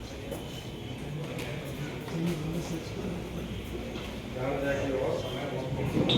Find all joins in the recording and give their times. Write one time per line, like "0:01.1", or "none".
none